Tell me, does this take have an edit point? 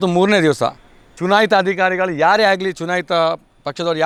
no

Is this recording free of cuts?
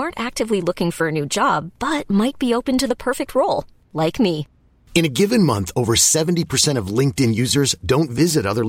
yes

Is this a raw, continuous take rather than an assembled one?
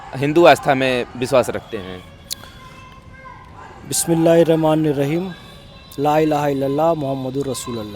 yes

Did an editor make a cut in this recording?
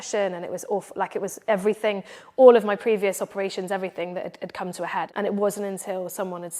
yes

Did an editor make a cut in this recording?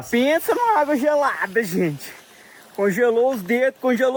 no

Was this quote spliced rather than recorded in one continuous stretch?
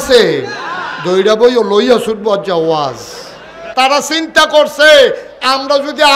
yes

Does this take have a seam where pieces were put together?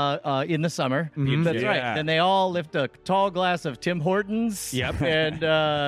yes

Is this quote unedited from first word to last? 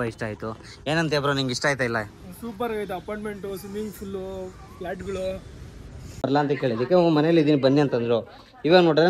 no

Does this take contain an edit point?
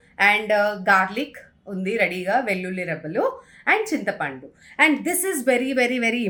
no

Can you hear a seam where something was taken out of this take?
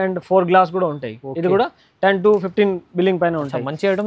no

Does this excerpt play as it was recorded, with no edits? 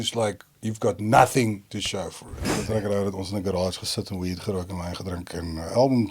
no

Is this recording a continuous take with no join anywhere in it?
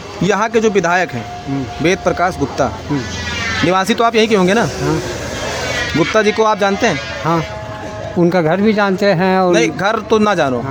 yes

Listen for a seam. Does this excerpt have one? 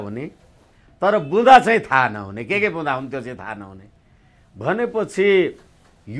no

